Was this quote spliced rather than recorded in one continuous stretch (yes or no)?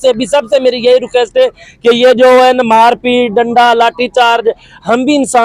no